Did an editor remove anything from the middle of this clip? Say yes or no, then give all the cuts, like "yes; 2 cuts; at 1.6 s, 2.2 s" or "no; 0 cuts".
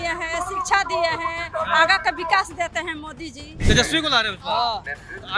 yes; 1 cut; at 3.5 s